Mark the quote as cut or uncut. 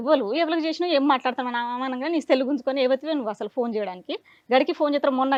uncut